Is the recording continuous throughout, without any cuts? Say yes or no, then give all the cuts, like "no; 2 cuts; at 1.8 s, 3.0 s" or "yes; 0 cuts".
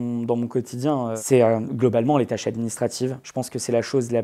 yes; 0 cuts